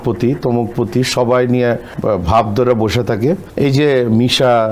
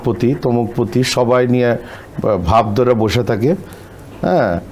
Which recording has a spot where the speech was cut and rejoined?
first; 2 cuts; at 1.9 s, 3.5 s

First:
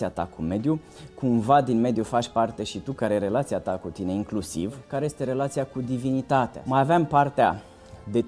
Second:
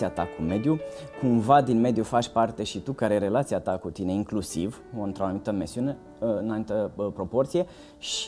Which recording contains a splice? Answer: first; 2 cuts; at 4.8 s, 6.6 s

